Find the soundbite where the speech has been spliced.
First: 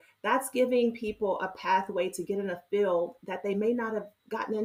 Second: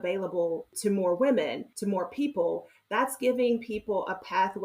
second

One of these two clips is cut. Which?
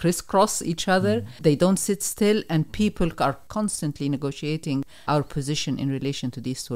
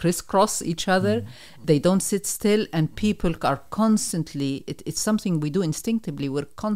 first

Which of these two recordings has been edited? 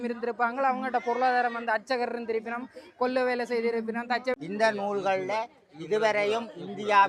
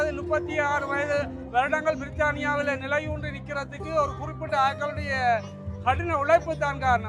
first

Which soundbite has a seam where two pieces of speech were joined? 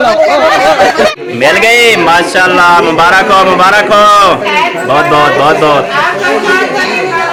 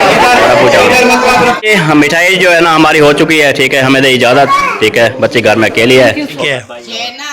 second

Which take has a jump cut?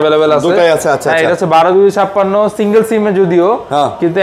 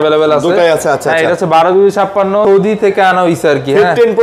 second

